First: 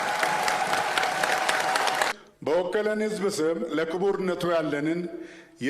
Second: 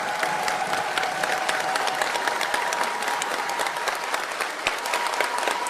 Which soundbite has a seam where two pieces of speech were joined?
first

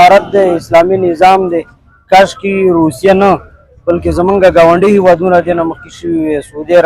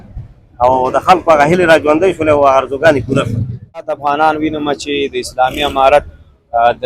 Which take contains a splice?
second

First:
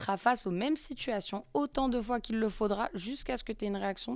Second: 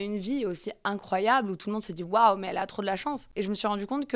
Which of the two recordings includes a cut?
second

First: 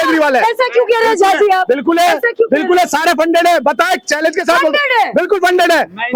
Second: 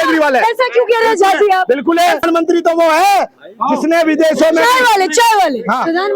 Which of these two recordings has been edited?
second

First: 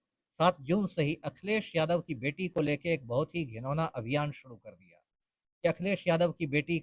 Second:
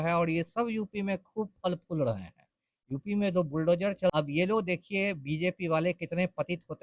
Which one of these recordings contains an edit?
second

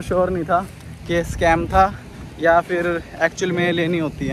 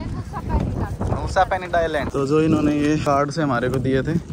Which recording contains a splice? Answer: second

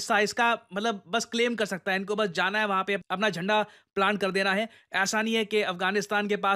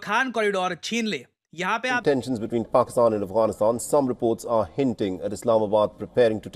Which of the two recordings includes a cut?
second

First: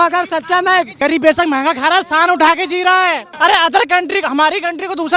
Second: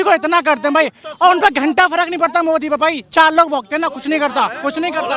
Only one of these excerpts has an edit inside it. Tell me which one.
first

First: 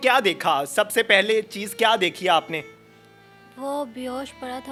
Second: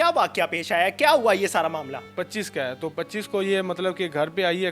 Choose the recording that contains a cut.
second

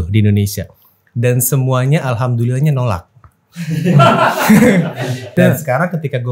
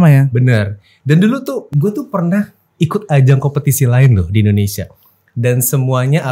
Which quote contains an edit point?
first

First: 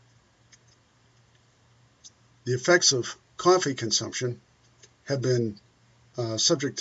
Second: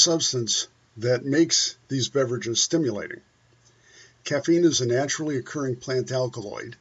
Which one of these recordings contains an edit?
first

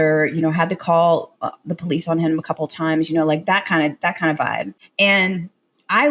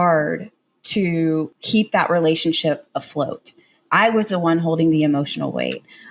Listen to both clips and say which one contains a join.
second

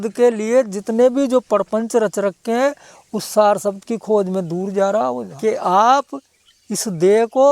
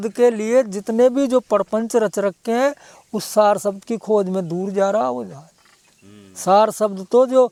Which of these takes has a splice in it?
first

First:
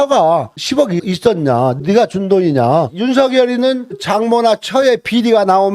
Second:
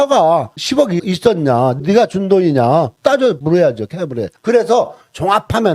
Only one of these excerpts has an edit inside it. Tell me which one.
first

